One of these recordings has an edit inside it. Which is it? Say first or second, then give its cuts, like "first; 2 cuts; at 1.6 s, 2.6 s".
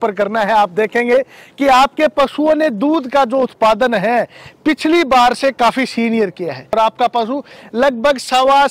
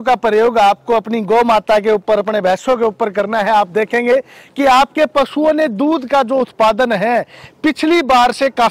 first; 1 cut; at 6.7 s